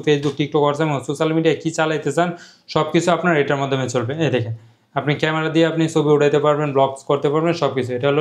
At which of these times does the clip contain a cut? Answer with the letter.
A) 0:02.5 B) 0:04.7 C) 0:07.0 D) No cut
D